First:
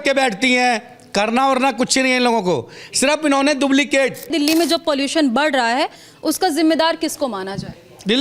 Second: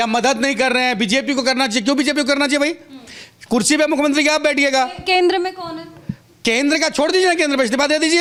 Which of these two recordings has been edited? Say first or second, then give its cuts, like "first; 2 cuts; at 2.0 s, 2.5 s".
first; 1 cut; at 4.3 s